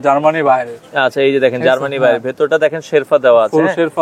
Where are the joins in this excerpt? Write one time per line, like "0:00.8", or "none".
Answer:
none